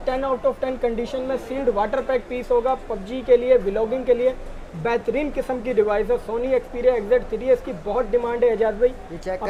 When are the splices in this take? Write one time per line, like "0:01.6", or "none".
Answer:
none